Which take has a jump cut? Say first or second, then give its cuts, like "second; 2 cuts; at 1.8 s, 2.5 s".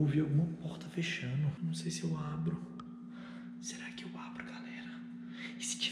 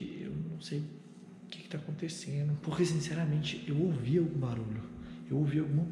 first; 1 cut; at 1.6 s